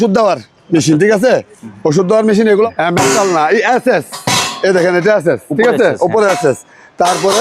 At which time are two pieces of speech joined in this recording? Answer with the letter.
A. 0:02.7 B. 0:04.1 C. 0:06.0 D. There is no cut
A